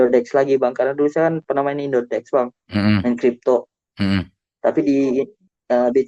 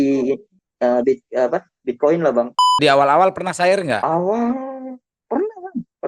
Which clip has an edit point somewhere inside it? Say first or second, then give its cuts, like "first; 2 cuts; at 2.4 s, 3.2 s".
second; 1 cut; at 2.7 s